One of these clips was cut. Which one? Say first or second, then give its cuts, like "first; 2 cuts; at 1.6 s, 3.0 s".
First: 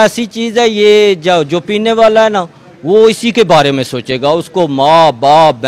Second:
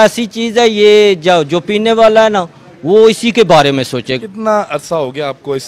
second; 1 cut; at 4.0 s